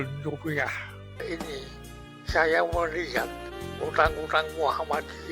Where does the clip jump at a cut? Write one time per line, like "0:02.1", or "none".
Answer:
0:01.2